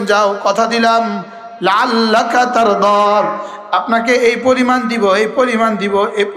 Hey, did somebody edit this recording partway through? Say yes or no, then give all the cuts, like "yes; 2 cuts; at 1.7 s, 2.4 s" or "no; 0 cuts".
no; 0 cuts